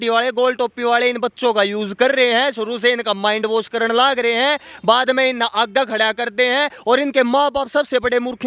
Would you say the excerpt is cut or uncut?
uncut